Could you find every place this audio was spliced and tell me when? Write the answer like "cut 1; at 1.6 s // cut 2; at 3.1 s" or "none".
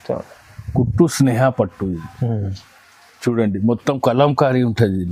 none